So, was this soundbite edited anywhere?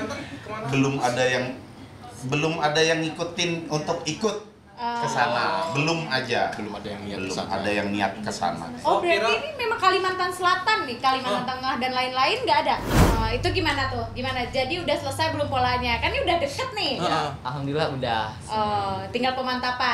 yes; 1 cut; at 13.0 s

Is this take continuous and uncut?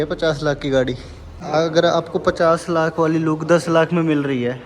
no; 1 cut; at 1.4 s

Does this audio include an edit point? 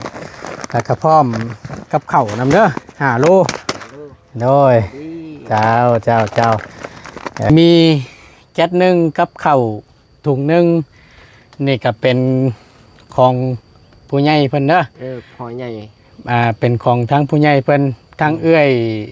yes; 1 cut; at 7.5 s

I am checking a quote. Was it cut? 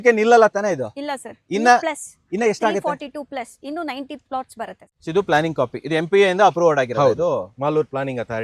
yes; 1 cut; at 4.8 s

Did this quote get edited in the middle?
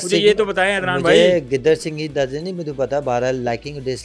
no; 0 cuts

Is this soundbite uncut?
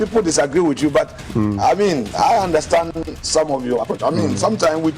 no; 1 cut; at 3.8 s

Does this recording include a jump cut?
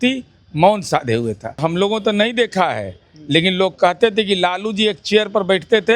yes; 1 cut; at 1.6 s

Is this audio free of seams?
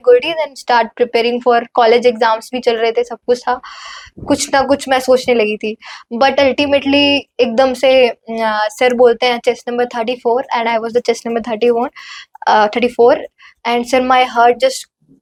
yes; 0 cuts

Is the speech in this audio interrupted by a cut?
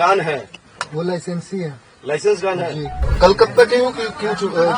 yes; 1 cut; at 3.0 s

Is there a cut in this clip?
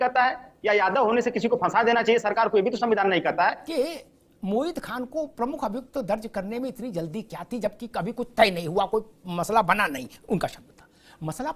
yes; 1 cut; at 3.6 s

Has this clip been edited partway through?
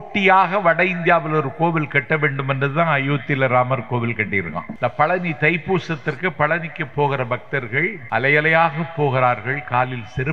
yes; 2 cuts; at 4.7 s, 8.0 s

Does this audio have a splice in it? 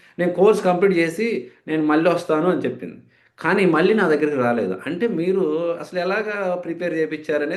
no; 0 cuts

